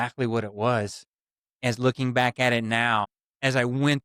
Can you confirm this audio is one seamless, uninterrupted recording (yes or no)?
yes